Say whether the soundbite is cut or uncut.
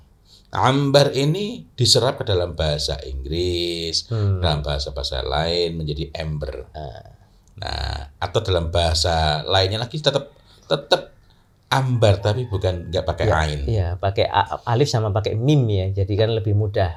uncut